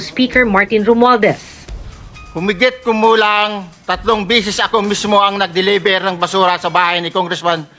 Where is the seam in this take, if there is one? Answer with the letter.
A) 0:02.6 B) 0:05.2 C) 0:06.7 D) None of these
D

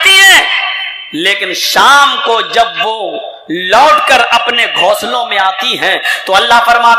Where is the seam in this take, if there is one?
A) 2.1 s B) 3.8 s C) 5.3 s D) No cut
D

